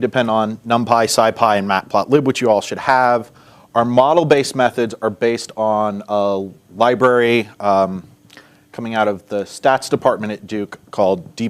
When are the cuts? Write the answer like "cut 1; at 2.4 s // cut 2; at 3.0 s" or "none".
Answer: cut 1; at 10.3 s